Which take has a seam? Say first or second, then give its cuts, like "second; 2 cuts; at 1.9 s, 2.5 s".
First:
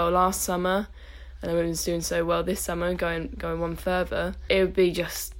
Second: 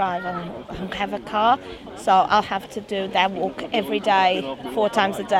first; 1 cut; at 4.4 s